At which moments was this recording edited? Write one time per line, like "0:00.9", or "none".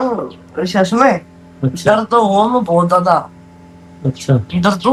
none